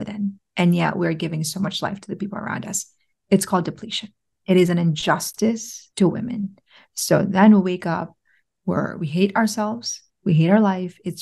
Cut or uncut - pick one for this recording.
cut